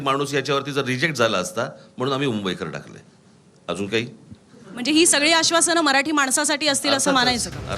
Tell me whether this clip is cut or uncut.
uncut